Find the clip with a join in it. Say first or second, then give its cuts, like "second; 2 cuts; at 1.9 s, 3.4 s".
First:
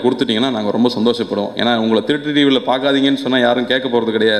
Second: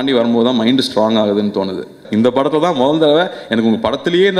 second; 1 cut; at 2.0 s